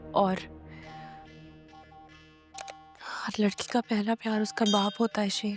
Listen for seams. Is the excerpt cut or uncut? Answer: uncut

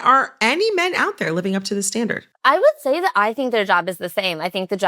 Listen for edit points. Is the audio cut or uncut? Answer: cut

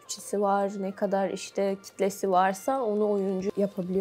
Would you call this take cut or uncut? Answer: uncut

